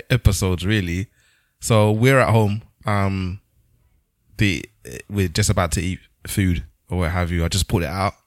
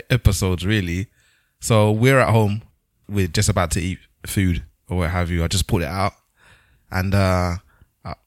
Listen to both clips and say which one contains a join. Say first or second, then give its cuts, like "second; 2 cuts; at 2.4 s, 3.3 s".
second; 1 cut; at 2.7 s